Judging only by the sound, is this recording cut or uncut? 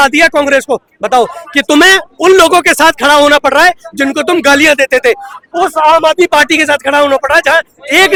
uncut